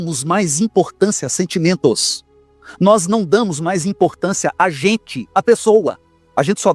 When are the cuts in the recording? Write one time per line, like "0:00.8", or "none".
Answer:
none